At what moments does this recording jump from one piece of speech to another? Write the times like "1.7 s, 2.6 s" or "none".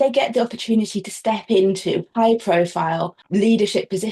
3.2 s